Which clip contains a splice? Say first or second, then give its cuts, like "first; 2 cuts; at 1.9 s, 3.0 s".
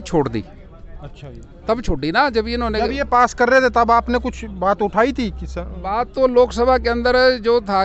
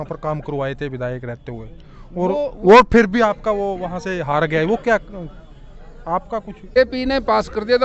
second; 1 cut; at 6.8 s